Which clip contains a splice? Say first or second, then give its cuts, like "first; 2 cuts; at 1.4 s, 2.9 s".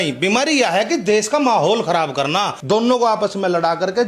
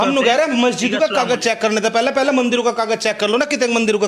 first; 1 cut; at 2.6 s